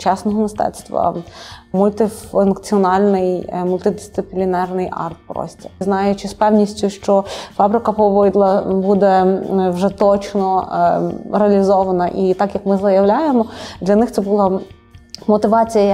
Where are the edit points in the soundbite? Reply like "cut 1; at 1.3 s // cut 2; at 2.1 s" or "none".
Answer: cut 1; at 1.7 s // cut 2; at 5.8 s